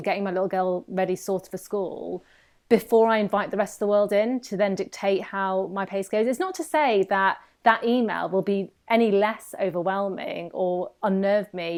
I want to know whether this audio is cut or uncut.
uncut